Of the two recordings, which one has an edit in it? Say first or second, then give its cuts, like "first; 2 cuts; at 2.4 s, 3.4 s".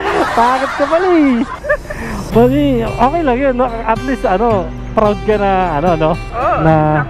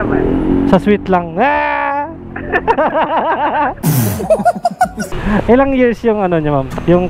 second; 1 cut; at 5.1 s